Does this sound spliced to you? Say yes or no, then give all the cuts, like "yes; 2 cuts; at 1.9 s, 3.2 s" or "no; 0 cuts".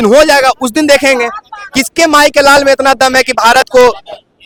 no; 0 cuts